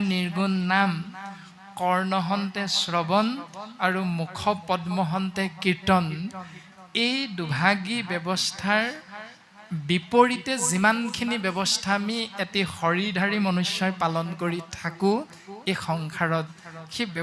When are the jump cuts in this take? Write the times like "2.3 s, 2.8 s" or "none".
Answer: none